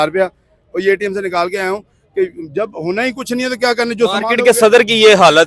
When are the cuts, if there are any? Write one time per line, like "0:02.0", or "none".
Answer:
none